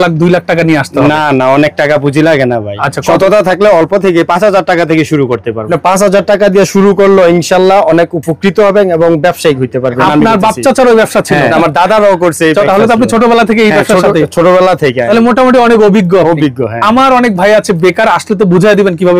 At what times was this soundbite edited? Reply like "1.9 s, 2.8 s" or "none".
5.6 s, 10.0 s, 11.5 s, 12.7 s, 15.0 s